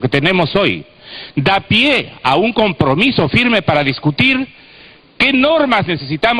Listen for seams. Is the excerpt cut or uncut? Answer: uncut